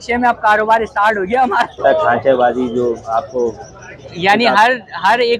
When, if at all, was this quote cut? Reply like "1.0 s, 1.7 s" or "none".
1.8 s